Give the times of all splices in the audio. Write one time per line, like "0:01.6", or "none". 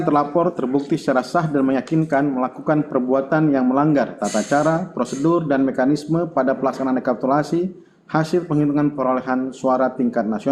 none